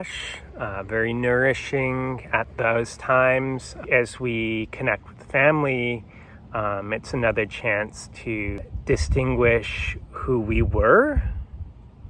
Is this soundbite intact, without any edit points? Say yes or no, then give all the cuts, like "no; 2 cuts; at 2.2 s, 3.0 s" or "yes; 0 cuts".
no; 3 cuts; at 2.5 s, 3.8 s, 8.6 s